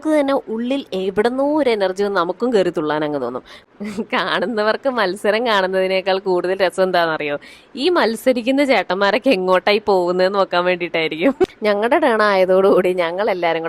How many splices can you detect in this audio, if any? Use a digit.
2